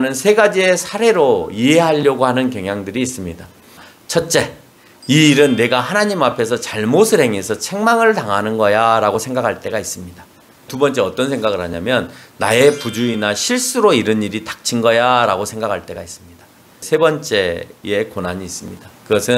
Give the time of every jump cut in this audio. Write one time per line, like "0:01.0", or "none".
0:03.9
0:10.7
0:16.8

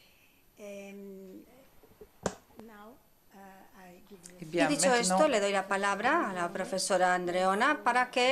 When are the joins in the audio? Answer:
0:03.8

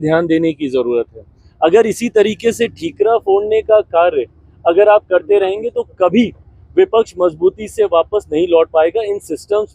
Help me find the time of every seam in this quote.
none

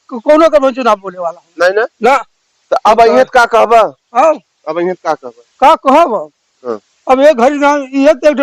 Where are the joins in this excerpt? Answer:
none

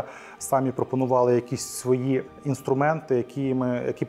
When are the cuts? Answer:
none

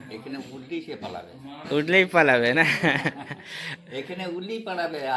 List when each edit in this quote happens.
none

